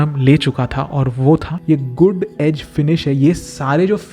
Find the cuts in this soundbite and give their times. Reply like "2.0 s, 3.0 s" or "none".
1.5 s